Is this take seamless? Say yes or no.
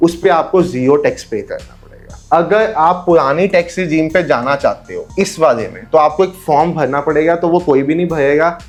yes